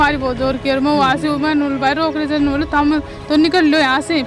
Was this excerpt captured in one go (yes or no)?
yes